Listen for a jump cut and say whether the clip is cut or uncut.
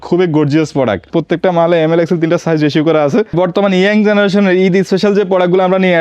cut